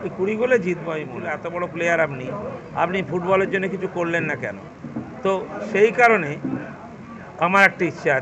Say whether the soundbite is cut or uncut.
cut